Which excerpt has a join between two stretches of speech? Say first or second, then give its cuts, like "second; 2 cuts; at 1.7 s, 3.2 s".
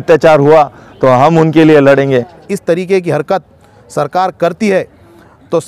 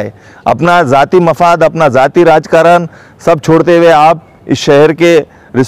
first; 1 cut; at 2.4 s